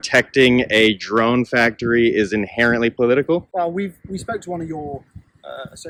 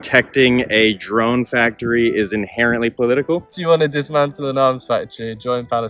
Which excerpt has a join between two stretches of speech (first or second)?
second